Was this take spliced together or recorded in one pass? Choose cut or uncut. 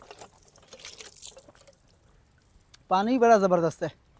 uncut